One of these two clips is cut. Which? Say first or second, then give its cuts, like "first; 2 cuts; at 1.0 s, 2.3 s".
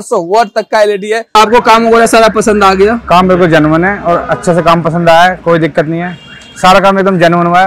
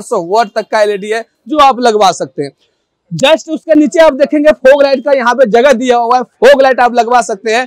first; 1 cut; at 1.3 s